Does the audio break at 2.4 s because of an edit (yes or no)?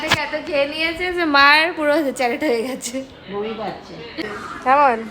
no